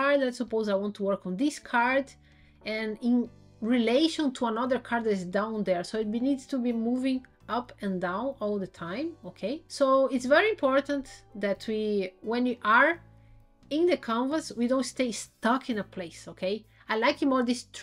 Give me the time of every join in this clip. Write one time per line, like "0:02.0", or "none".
0:09.7